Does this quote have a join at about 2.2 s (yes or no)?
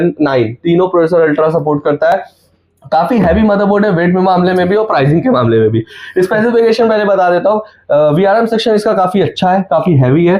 no